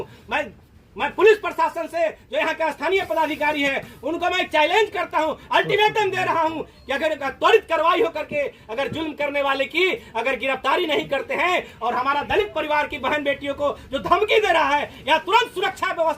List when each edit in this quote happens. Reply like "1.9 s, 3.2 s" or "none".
none